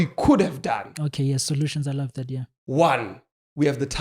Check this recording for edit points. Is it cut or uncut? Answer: uncut